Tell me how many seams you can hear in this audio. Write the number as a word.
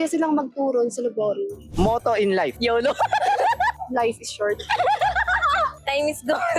one